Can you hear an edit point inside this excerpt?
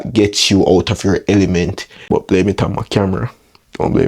yes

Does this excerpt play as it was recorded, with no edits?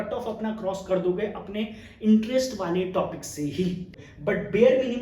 no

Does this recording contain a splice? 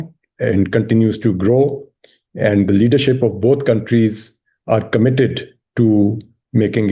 no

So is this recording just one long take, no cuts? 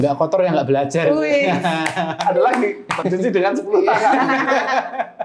yes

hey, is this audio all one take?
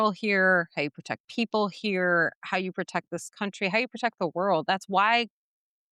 yes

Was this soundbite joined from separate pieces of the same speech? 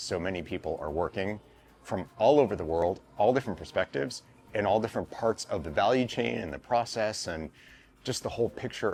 no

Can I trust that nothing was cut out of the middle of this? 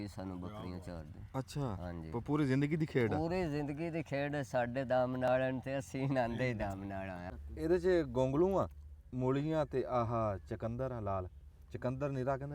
no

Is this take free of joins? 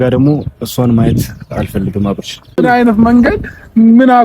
no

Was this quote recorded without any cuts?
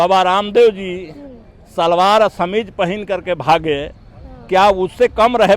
yes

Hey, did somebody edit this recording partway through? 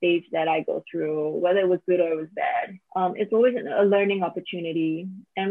yes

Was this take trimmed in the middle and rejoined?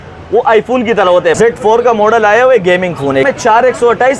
yes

